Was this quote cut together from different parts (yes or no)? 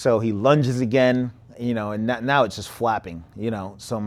no